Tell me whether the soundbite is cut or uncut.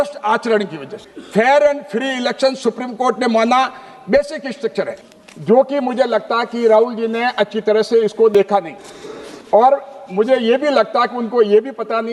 cut